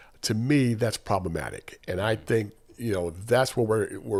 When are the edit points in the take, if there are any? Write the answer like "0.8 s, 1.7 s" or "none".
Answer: none